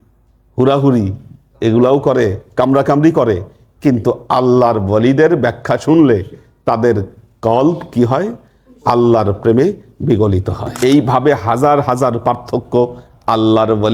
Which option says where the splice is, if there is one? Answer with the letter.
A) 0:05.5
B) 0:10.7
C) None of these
B